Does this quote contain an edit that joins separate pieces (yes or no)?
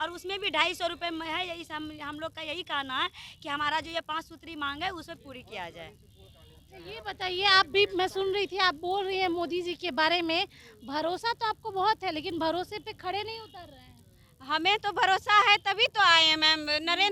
no